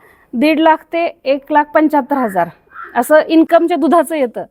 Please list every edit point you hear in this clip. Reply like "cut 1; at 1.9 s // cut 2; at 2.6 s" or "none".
none

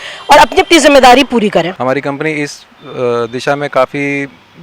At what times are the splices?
cut 1; at 1.7 s

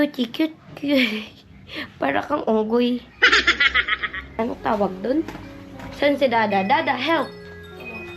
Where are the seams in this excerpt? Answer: cut 1; at 4.3 s

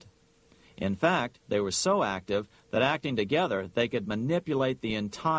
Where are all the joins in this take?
none

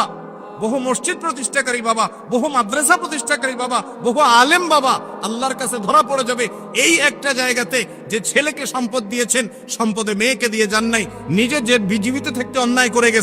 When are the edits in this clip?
none

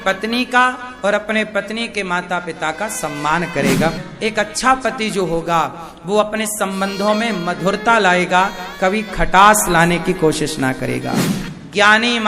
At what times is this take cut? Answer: cut 1; at 4.0 s // cut 2; at 11.3 s

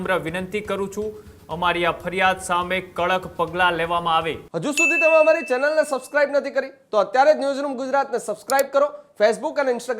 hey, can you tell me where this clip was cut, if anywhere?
cut 1; at 4.4 s

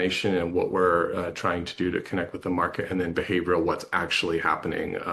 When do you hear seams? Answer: none

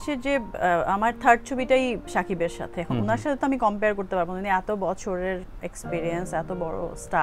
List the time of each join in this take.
cut 1; at 5.5 s

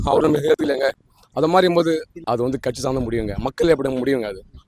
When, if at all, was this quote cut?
cut 1; at 2.1 s

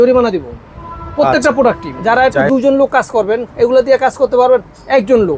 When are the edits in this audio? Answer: cut 1; at 1.9 s

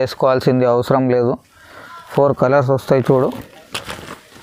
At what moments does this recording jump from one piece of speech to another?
none

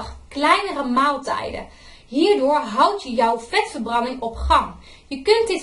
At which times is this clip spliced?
cut 1; at 3.5 s

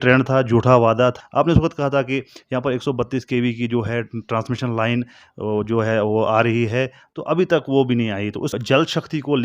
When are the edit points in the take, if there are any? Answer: cut 1; at 1.2 s // cut 2; at 8.5 s

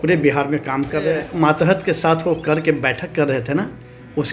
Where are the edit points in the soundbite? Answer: cut 1; at 1.3 s

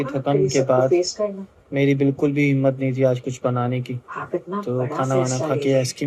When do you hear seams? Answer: none

